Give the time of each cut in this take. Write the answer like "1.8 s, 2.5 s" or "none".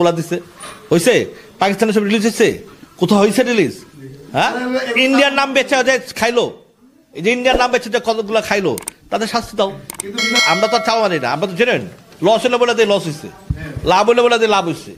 10.4 s